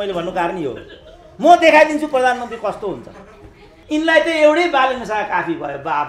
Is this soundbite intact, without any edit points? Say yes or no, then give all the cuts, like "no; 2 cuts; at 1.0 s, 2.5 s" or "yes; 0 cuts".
no; 1 cut; at 3.8 s